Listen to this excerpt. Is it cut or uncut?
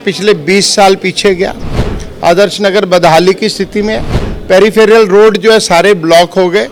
uncut